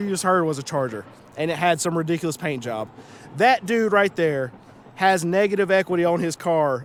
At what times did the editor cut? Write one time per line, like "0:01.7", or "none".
none